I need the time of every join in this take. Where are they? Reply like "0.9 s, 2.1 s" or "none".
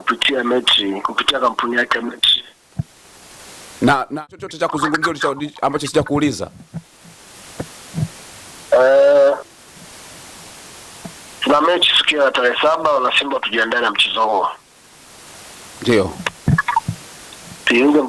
4.2 s